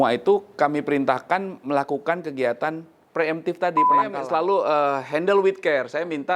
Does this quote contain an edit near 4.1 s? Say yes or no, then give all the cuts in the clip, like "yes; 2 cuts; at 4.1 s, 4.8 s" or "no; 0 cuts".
yes; 1 cut; at 4.1 s